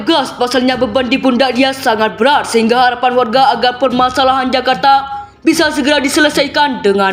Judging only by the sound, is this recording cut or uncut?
uncut